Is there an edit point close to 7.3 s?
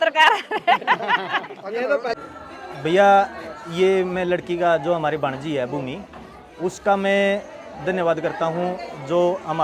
no; 1 cut; at 2.1 s

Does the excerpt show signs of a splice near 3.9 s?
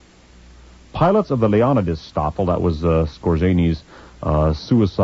no; 0 cuts

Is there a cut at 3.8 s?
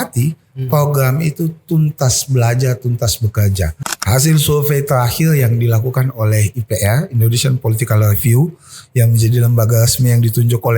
yes; 1 cut; at 3.8 s

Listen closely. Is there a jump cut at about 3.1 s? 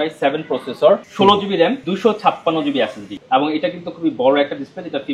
yes; 2 cuts; at 1.9 s, 3.1 s

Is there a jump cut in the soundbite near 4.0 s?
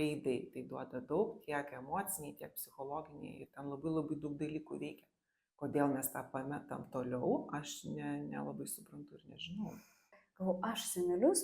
no; 1 cut; at 10.1 s

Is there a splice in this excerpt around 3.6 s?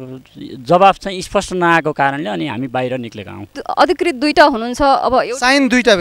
yes; 1 cut; at 3.6 s

